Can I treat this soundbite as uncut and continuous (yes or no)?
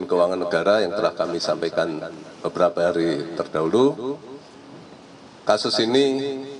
yes